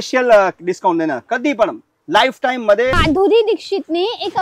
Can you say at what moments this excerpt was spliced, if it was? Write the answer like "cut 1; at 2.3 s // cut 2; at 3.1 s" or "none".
cut 1; at 3.0 s